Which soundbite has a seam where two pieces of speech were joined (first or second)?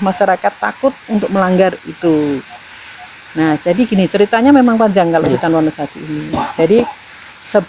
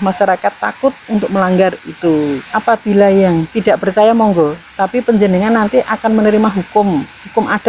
second